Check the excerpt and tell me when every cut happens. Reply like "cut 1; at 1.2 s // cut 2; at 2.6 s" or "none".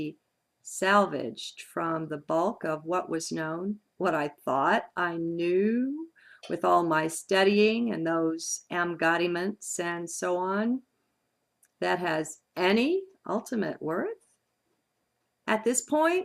cut 1; at 10.1 s